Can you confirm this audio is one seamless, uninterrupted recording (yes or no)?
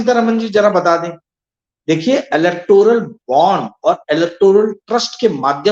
yes